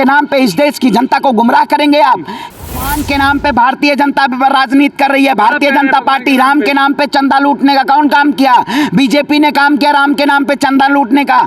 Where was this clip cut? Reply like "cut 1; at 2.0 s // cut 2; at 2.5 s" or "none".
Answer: cut 1; at 2.5 s